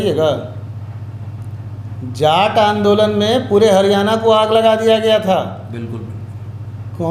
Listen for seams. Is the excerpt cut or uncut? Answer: uncut